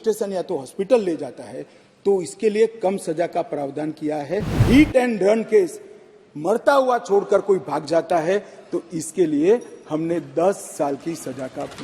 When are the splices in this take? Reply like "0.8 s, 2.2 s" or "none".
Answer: 4.6 s